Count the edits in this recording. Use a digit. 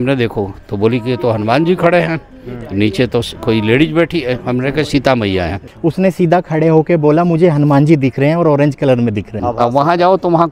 2